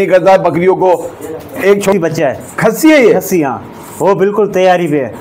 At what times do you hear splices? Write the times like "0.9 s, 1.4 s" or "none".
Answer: 1.9 s